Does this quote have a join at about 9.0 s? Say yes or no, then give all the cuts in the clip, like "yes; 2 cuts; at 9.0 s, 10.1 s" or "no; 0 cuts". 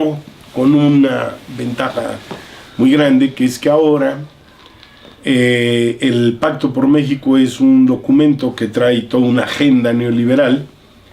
yes; 1 cut; at 9.0 s